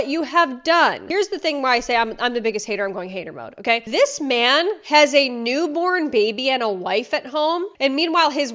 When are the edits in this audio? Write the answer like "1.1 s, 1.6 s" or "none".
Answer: 1.0 s